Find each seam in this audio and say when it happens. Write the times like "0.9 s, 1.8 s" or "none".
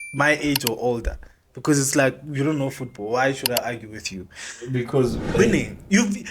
5.3 s